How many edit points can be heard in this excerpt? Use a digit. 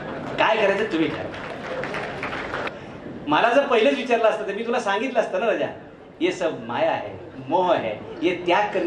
1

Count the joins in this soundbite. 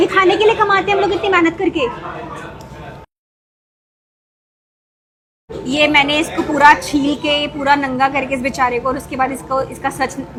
0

